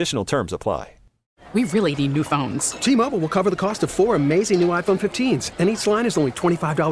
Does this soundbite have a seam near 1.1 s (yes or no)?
yes